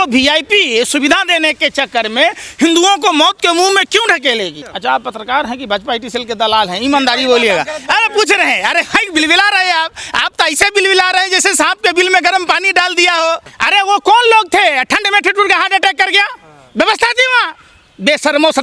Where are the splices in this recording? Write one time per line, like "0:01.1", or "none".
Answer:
0:04.7
0:13.5

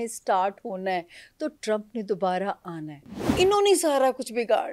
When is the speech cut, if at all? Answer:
0:03.2

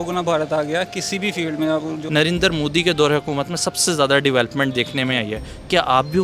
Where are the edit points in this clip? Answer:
0:02.0

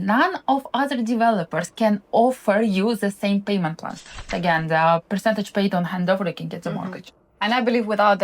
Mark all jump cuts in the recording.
0:04.3

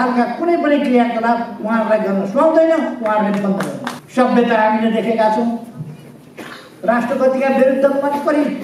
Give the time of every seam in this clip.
0:04.0

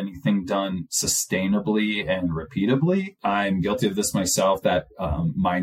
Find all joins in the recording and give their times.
0:03.2

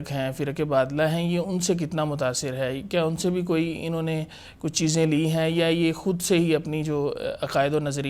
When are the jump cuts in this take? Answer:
none

